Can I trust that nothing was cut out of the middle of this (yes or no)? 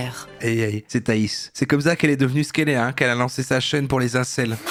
yes